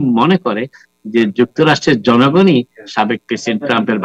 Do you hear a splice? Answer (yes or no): no